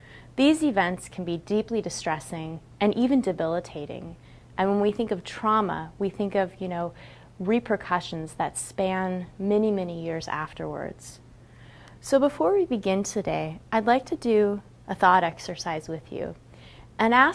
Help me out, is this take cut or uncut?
cut